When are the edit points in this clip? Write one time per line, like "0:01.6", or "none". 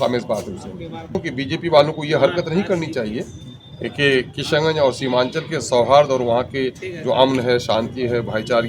0:01.2